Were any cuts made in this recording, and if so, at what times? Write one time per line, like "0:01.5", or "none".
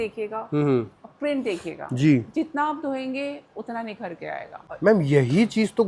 0:04.6

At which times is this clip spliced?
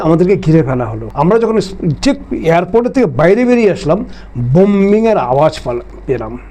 none

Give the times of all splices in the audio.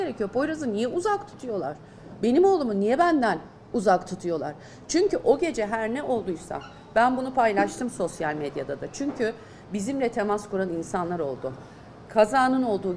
none

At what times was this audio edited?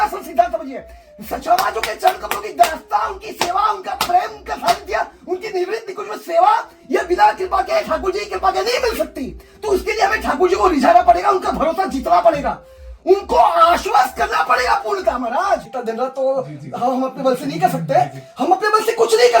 0:15.7

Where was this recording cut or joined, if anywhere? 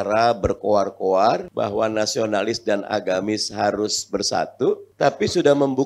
0:01.5
0:04.9

